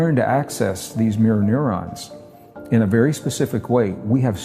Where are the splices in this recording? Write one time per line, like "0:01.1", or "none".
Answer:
none